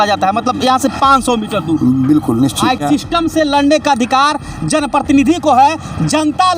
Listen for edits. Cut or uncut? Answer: cut